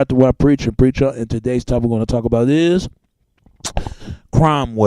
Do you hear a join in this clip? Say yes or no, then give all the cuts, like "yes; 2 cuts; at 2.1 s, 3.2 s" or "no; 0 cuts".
yes; 1 cut; at 2.2 s